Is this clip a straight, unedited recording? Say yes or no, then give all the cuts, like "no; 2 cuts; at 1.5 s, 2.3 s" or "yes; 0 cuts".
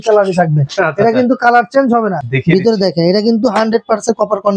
no; 1 cut; at 2.3 s